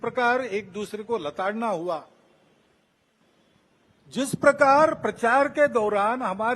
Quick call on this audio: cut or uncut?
uncut